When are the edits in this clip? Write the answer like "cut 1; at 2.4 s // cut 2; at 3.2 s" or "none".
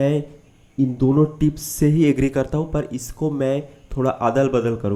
none